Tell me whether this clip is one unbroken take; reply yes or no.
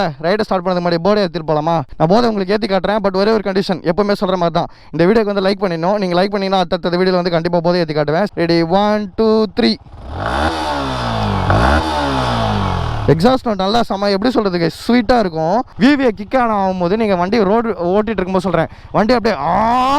no